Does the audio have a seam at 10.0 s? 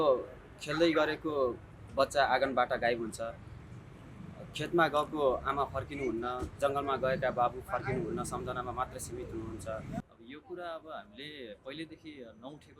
yes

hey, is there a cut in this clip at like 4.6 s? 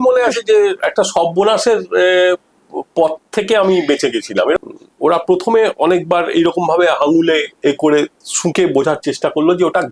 yes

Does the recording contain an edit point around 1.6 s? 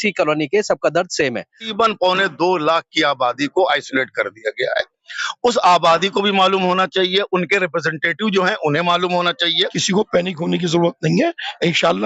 yes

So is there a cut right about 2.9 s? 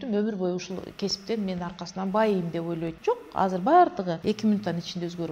yes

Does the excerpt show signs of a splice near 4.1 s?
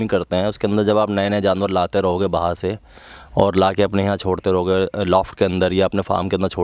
no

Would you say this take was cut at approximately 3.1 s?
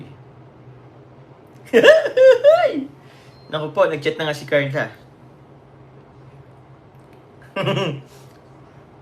no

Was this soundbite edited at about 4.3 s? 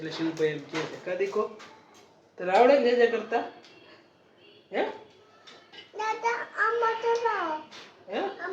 no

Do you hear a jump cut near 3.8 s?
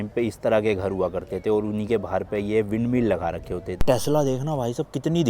yes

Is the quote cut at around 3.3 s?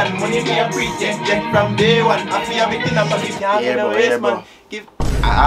no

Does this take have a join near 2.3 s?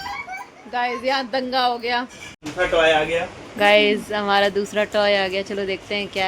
yes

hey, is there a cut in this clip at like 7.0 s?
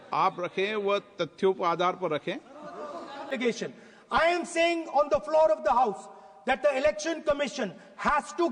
no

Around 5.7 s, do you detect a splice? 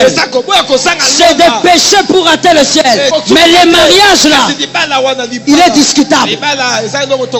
no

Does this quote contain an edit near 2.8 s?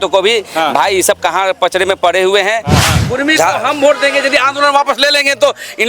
yes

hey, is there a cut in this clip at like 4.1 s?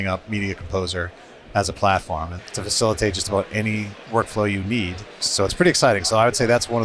no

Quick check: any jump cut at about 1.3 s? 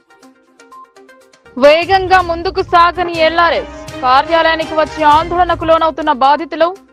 no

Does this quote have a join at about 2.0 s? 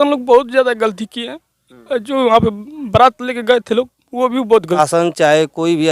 no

